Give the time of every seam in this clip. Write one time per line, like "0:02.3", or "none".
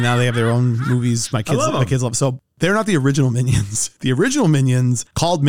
none

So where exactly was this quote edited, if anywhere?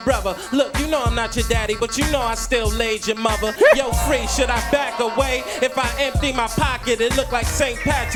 none

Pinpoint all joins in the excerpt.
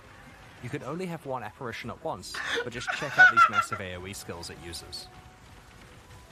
none

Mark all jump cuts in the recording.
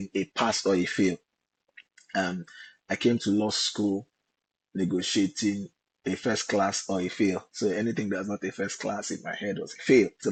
none

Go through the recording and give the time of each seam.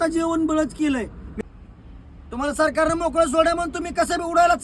0:01.2

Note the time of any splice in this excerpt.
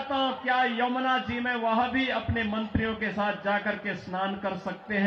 none

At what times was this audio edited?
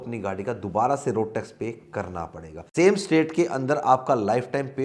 none

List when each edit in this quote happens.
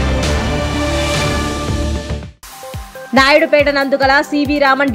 0:02.9

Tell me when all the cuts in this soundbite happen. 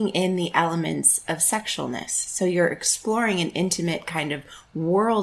none

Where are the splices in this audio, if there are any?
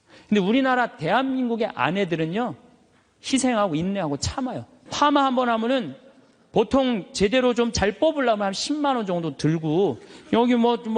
0:04.7

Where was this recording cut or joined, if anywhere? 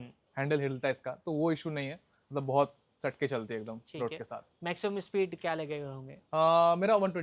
none

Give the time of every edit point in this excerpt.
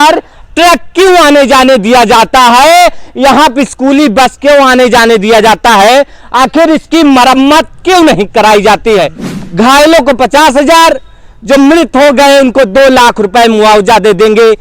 0:09.2

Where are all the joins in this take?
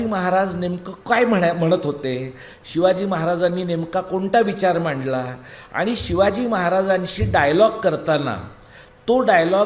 none

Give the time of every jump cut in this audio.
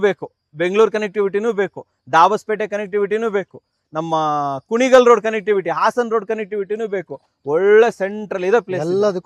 none

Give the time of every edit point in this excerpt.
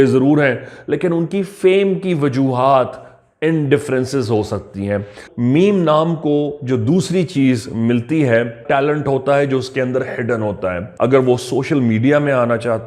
0:05.2
0:08.6
0:10.8

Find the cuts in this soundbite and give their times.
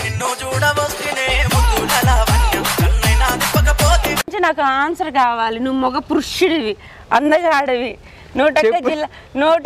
0:04.3

